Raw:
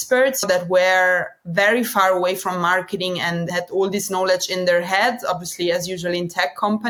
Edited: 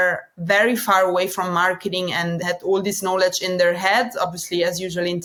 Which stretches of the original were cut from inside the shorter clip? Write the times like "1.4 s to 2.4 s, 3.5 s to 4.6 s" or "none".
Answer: none

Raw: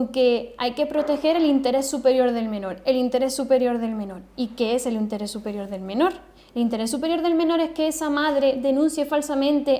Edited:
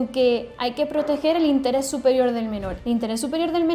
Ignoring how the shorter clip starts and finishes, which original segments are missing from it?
2.7 s to 6.4 s

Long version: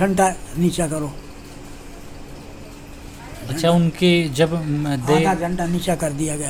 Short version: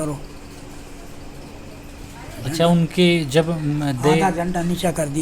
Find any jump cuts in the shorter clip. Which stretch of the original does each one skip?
2.7 s to 2.8 s

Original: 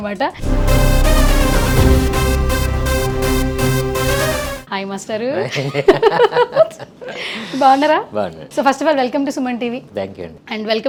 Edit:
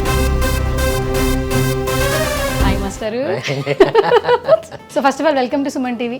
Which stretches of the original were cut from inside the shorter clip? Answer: 6.9 s to 8.4 s

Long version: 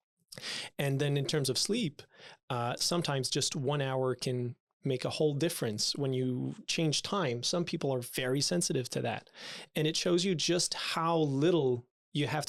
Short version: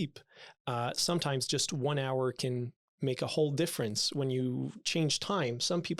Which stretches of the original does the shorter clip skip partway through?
none

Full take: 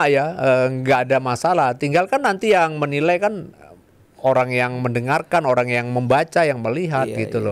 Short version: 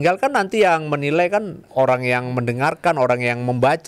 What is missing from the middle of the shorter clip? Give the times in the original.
3.5 s to 4.1 s

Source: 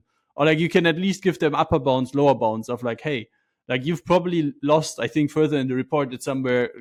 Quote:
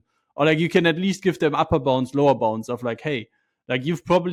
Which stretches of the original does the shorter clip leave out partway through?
none

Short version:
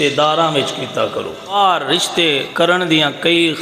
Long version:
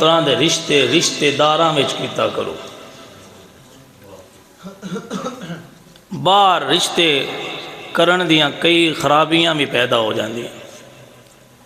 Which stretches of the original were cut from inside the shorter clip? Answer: 2.7 s to 6.3 s, 7.3 s to 7.9 s

